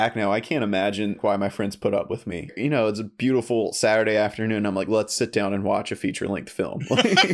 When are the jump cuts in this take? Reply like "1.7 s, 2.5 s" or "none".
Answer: 1.2 s, 2.5 s